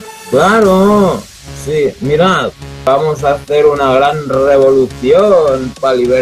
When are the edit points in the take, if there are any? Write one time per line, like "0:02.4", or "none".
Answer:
none